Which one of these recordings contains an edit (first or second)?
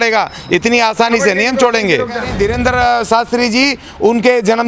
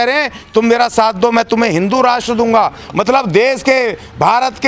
first